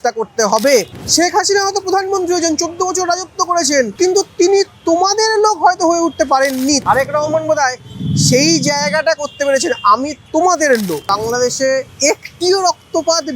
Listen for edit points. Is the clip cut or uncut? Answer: cut